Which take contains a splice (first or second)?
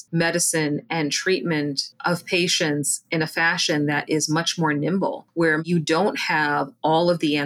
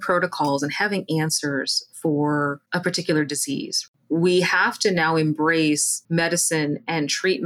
second